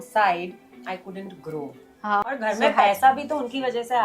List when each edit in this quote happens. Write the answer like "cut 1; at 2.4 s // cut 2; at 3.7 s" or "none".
cut 1; at 2.1 s

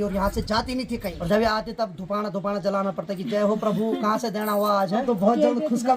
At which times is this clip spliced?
cut 1; at 1.1 s // cut 2; at 5.0 s

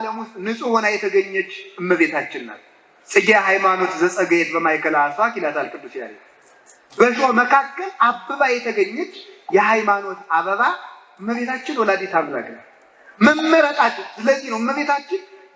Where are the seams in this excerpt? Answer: none

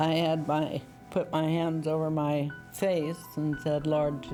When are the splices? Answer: none

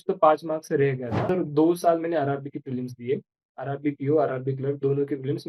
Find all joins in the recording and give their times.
cut 1; at 1.3 s

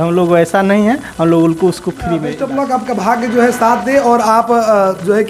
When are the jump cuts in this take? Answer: cut 1; at 2.3 s

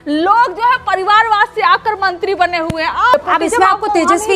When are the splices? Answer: cut 1; at 3.1 s

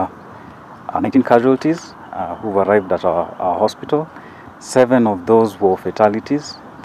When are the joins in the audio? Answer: cut 1; at 1.2 s

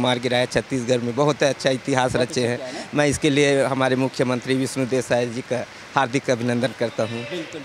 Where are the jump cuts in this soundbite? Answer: none

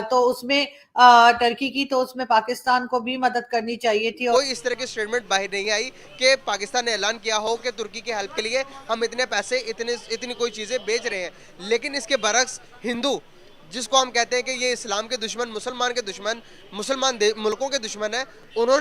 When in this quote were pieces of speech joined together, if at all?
cut 1; at 4.3 s

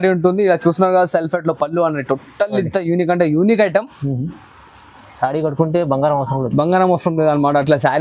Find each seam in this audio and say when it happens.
none

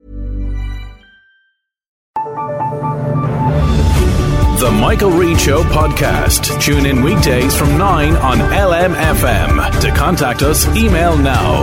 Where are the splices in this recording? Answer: cut 1; at 2.0 s

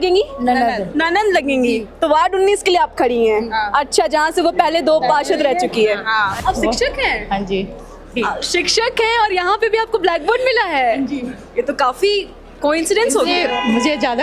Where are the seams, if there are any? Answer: cut 1; at 6.3 s

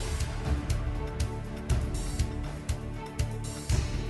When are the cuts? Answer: cut 1; at 3.1 s

